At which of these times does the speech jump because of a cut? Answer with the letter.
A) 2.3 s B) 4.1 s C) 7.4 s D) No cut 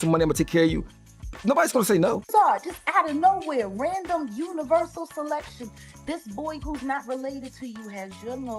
A